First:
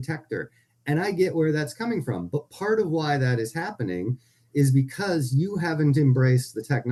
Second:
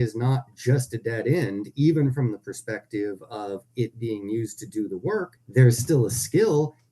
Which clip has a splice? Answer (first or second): second